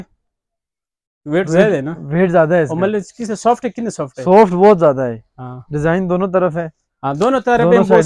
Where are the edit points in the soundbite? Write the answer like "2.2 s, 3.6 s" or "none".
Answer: none